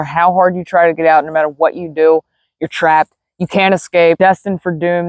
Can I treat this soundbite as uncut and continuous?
no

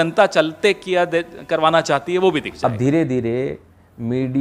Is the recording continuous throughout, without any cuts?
no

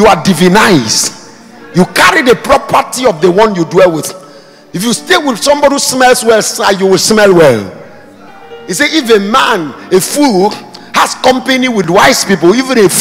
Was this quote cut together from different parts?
yes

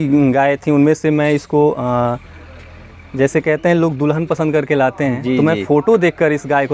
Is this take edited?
no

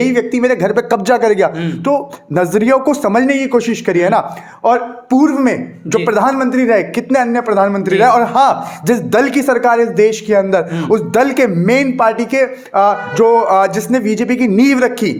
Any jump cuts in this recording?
no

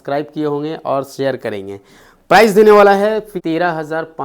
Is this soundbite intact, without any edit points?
no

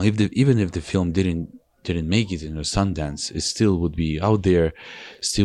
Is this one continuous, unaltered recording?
yes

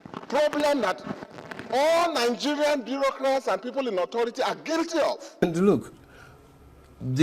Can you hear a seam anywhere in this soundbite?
yes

